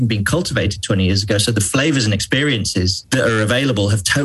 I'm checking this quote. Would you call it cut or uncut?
cut